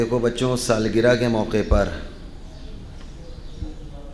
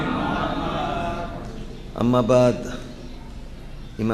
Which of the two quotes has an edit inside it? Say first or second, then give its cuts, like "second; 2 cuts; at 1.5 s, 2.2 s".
first; 1 cut; at 1.2 s